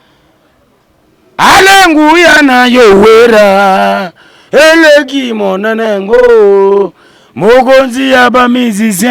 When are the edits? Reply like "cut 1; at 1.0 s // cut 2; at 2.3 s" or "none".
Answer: none